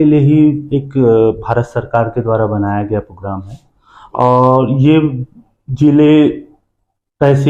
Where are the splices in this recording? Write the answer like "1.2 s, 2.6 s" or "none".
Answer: none